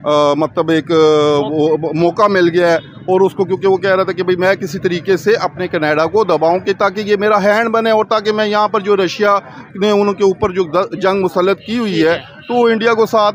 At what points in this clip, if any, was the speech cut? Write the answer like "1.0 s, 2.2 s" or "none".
none